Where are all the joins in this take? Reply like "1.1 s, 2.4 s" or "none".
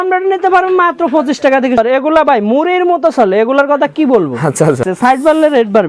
1.8 s, 4.8 s